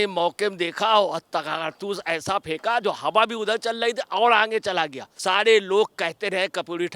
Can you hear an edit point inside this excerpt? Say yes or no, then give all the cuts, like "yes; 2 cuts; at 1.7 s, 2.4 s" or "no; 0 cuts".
yes; 1 cut; at 5.1 s